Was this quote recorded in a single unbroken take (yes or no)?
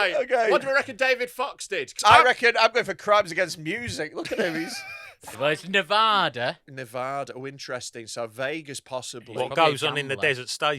no